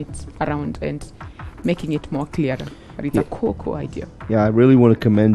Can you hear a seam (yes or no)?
no